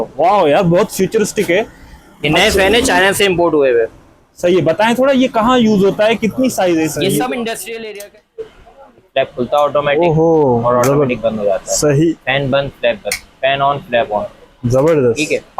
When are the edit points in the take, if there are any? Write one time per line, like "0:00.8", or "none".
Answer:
0:07.7